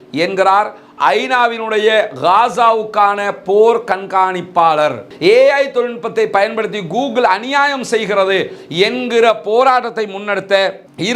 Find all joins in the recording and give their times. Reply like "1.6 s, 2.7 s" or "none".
5.1 s